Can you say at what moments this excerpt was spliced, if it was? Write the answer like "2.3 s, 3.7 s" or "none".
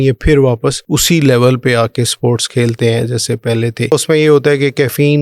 0.8 s, 3.9 s